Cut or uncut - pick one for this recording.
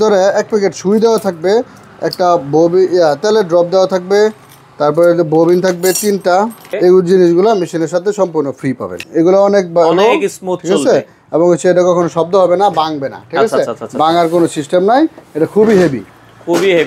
cut